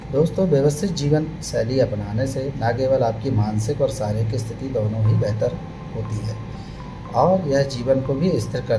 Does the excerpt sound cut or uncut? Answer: uncut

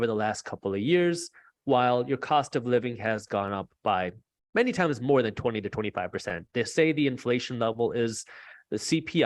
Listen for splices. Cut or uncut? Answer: uncut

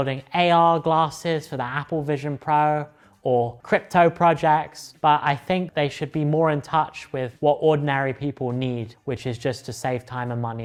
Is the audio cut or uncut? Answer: uncut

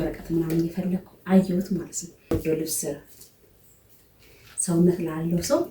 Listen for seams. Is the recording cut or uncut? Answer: cut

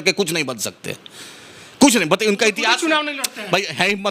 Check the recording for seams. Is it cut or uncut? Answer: uncut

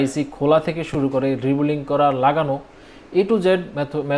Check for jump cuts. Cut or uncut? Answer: uncut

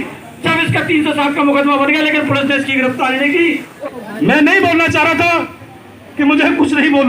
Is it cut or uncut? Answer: cut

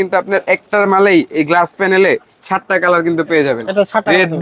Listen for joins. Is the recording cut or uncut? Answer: uncut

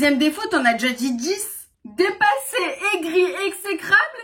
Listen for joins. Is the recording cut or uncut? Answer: cut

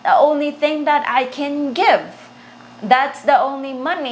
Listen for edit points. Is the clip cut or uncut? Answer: uncut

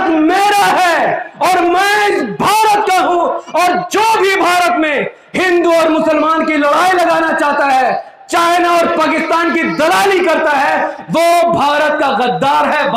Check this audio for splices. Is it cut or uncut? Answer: uncut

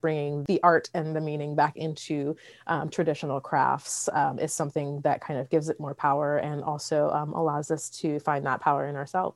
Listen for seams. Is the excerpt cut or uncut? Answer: uncut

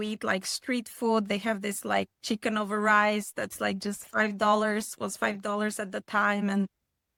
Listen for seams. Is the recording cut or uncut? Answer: uncut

